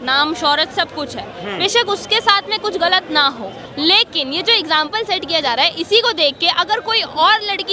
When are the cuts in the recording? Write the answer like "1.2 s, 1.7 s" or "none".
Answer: 3.6 s